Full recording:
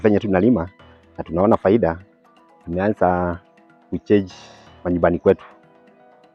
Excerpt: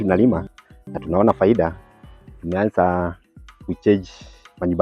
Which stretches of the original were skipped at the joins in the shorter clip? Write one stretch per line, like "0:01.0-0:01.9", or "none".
none